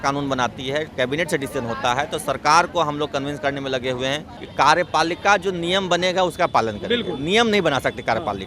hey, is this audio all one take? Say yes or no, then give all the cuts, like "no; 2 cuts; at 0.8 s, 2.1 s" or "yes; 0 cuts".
no; 1 cut; at 4.4 s